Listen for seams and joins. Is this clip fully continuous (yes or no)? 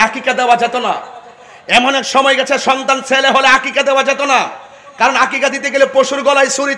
yes